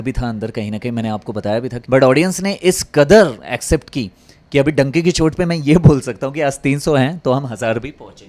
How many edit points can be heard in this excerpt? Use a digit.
1